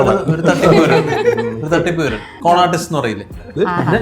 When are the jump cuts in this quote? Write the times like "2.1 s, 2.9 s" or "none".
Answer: 2.3 s